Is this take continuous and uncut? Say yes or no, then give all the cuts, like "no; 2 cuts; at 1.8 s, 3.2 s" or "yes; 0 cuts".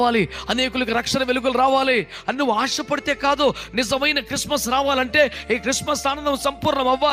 yes; 0 cuts